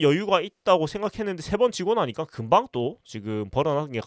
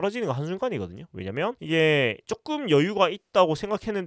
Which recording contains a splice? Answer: second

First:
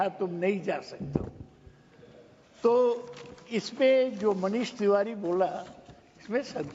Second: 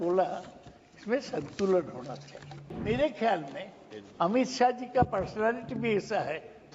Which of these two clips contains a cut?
second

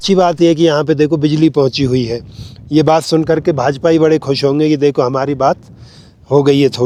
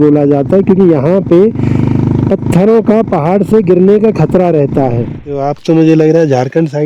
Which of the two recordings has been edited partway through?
second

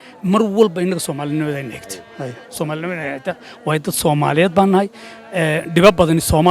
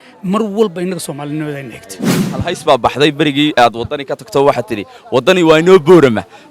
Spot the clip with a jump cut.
second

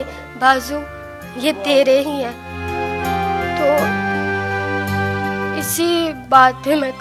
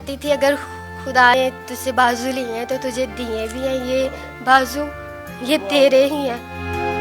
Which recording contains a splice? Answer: second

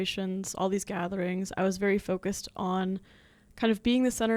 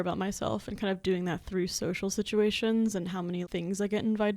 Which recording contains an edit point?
second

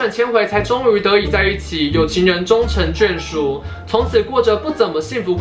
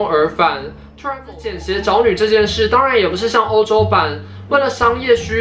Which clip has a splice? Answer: second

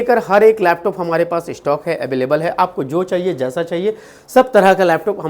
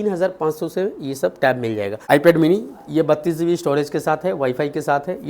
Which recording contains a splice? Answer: second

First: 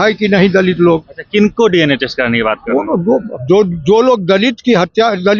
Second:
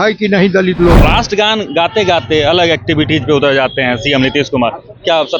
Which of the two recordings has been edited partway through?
second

